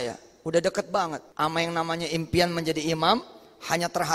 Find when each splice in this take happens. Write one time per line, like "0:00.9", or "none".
0:01.2